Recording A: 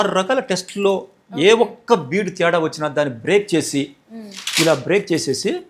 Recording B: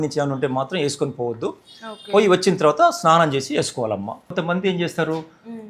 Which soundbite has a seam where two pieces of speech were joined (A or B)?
B